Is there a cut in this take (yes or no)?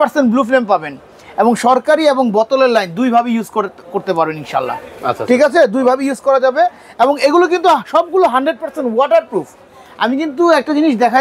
no